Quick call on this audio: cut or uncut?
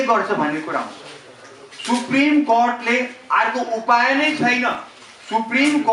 uncut